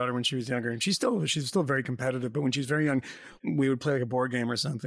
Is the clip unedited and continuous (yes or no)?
no